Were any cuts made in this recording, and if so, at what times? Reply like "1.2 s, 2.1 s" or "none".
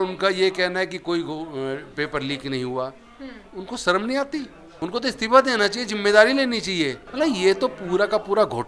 4.6 s, 7.0 s